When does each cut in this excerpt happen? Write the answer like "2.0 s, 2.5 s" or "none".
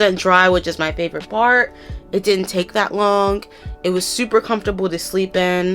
none